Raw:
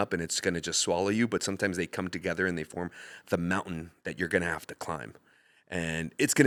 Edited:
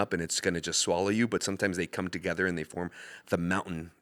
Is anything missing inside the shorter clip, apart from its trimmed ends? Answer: no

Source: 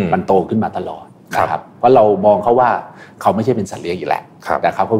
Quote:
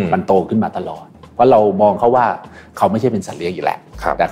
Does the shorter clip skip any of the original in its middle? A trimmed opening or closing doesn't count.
yes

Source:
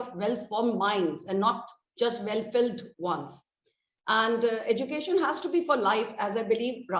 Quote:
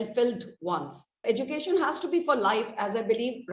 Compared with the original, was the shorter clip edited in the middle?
yes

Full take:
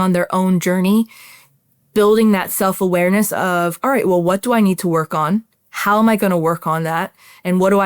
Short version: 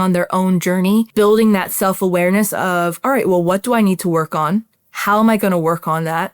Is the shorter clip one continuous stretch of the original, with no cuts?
no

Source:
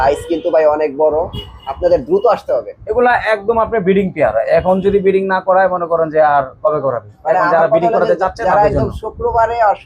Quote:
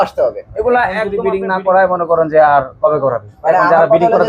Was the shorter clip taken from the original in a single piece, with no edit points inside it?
no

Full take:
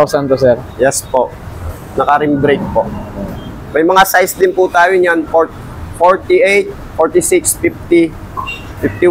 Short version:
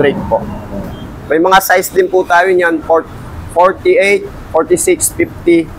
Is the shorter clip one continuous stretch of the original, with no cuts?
yes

